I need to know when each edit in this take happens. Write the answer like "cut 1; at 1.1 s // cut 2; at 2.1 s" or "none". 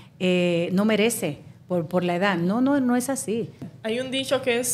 cut 1; at 3.7 s